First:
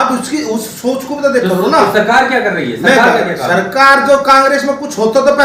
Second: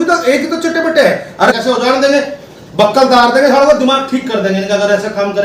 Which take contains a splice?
second; 1 cut; at 1.5 s

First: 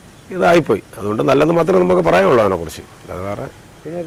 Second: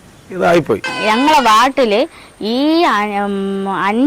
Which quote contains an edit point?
second; 1 cut; at 0.9 s

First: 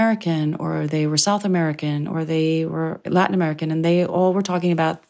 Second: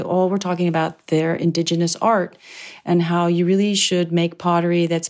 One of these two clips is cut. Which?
first; 1 cut; at 3.0 s

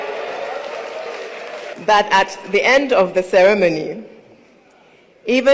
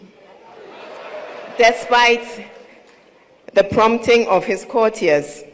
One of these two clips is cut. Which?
first; 1 cut; at 1.7 s

